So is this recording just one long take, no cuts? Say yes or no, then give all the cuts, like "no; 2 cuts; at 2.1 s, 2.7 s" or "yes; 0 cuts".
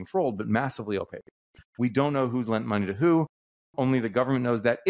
yes; 0 cuts